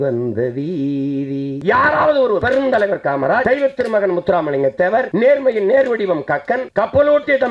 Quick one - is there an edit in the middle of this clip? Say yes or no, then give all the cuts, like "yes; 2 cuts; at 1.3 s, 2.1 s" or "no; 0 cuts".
yes; 5 cuts; at 1.6 s, 2.4 s, 3.4 s, 5.1 s, 6.7 s